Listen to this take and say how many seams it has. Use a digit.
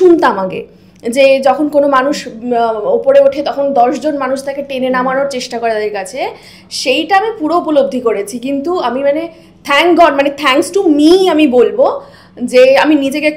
0